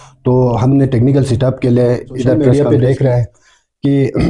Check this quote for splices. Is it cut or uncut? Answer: cut